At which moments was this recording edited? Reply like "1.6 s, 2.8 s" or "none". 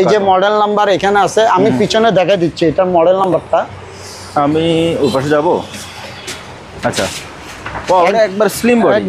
none

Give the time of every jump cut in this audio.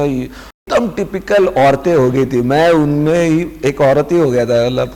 none

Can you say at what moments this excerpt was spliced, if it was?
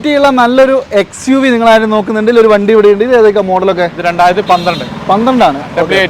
none

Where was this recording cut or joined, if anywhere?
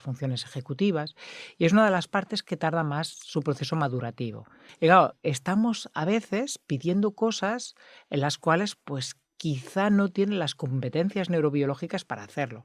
4.6 s

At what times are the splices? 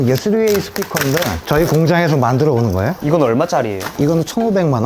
2.9 s, 3.8 s

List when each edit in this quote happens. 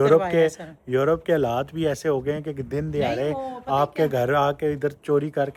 none

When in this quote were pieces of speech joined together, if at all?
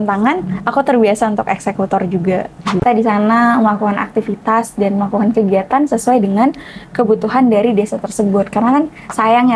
2.8 s

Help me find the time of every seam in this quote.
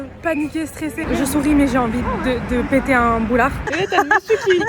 1.1 s, 3.6 s

